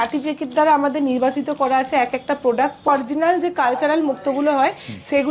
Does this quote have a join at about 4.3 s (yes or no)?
no